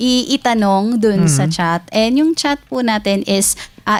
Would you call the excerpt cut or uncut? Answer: uncut